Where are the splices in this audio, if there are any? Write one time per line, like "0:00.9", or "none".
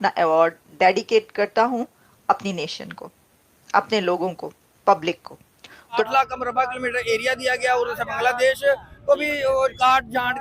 0:06.1